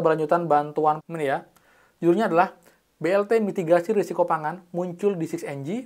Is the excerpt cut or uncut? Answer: cut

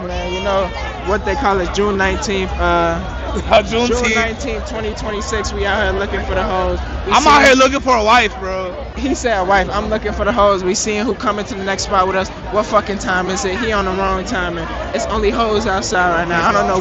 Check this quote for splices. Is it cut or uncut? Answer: uncut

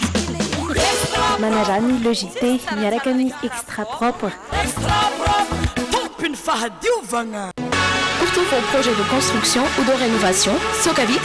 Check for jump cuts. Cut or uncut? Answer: uncut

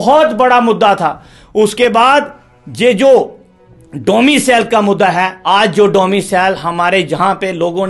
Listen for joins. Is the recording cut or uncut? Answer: uncut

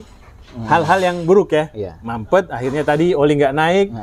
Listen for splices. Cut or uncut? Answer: uncut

